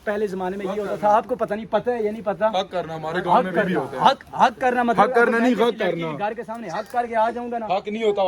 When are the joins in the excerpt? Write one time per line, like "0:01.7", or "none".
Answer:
none